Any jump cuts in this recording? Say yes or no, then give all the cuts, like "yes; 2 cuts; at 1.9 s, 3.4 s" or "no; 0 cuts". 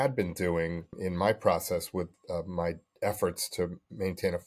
yes; 1 cut; at 1.0 s